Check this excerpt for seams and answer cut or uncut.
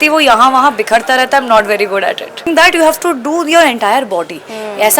cut